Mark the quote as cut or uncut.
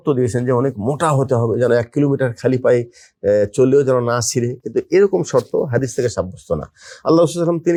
uncut